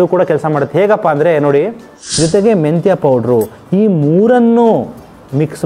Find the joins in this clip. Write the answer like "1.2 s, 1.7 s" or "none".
2.0 s